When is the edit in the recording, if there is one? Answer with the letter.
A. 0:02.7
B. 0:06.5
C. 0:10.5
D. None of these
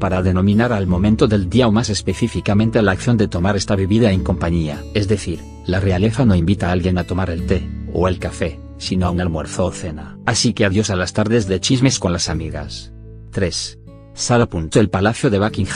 B